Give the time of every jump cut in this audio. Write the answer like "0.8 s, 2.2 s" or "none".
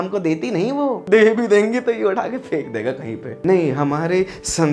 1.0 s, 3.3 s